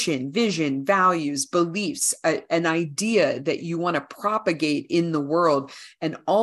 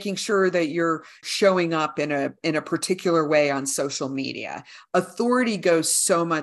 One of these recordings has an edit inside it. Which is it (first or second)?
second